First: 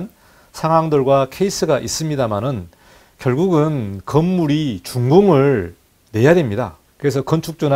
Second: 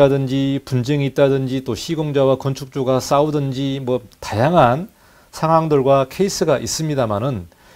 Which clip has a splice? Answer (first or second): first